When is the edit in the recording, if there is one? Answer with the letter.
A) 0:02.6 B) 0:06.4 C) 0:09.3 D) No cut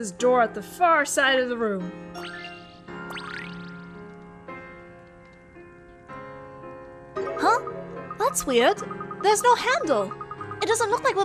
D